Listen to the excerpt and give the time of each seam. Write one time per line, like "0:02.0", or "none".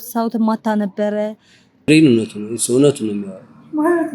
0:01.9